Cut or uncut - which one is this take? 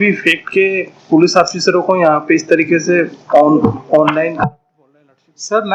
uncut